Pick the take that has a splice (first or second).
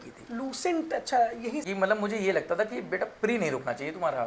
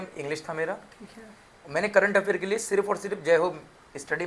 first